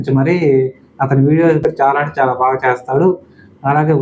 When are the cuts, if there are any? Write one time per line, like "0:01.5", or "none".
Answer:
0:01.6